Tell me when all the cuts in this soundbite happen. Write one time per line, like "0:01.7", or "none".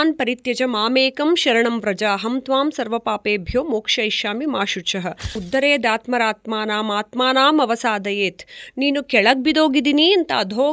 0:05.4

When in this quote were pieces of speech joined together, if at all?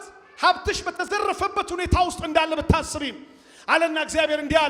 none

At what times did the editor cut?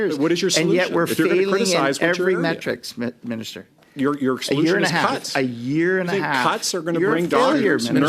0:03.7

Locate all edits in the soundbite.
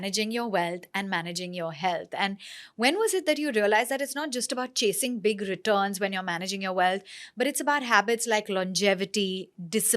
none

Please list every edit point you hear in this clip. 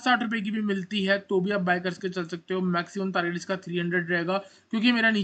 none

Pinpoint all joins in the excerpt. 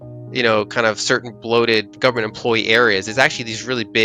0:01.9

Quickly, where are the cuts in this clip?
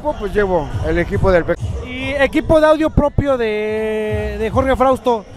0:01.6

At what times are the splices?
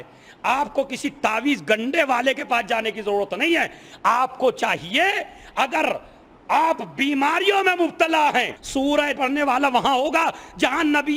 0:09.1

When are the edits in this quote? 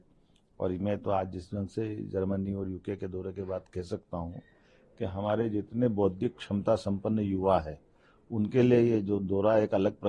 none

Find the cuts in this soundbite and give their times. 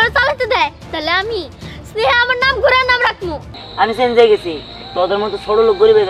0:03.6

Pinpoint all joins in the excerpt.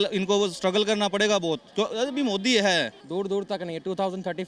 0:03.0

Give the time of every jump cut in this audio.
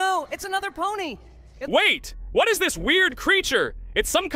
0:01.6

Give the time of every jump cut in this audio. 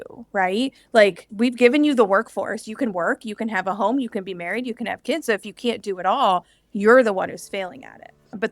0:01.2

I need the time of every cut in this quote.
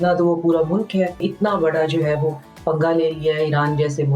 0:01.2

